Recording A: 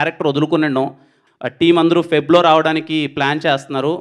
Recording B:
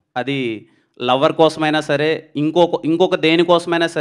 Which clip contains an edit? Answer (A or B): A